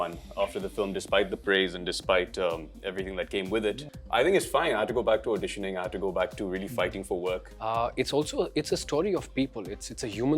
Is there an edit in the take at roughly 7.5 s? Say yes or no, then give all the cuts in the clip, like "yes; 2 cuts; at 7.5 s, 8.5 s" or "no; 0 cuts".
yes; 2 cuts; at 3.9 s, 7.5 s